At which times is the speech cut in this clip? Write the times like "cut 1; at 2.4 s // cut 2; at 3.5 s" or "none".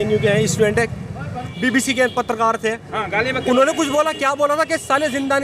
cut 1; at 1.4 s